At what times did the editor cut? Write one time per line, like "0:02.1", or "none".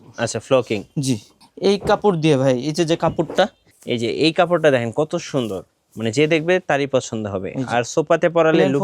0:03.7